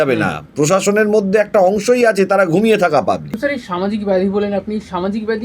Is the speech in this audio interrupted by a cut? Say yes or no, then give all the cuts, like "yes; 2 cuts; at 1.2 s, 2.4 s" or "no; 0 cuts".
yes; 1 cut; at 3.4 s